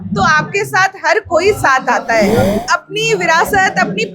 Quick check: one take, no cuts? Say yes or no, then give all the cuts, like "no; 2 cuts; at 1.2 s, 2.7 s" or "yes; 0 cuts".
no; 1 cut; at 2.6 s